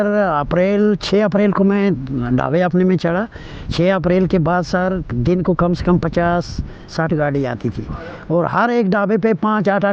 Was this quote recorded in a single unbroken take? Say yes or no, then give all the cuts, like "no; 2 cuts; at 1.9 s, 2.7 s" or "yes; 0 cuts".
yes; 0 cuts